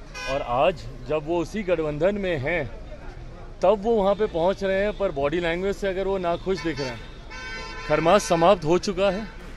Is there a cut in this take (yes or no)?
no